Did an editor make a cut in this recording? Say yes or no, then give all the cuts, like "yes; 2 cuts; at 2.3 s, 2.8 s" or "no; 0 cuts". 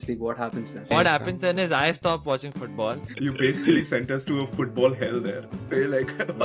yes; 2 cuts; at 0.9 s, 3.1 s